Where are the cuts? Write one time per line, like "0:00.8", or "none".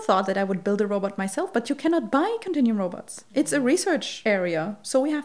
0:04.1